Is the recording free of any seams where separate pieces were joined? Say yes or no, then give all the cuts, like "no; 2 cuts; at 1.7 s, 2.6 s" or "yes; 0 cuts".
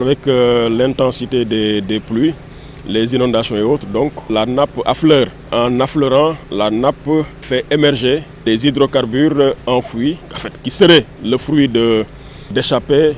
no; 4 cuts; at 4.3 s, 5.5 s, 7.4 s, 8.4 s